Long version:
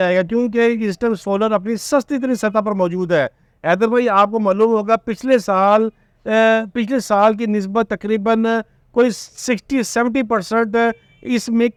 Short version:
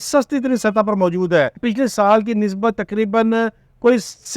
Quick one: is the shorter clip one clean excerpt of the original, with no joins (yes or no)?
no